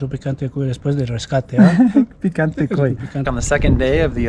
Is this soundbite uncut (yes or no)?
no